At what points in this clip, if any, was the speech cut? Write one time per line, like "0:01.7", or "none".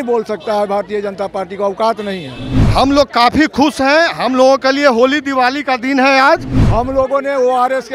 0:06.6